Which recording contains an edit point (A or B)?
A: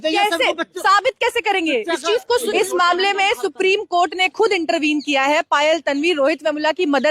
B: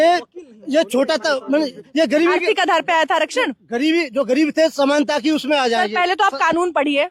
A